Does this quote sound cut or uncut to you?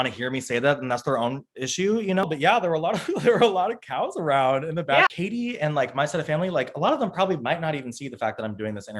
cut